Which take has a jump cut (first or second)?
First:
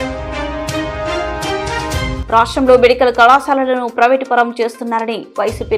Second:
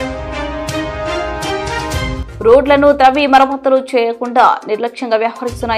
first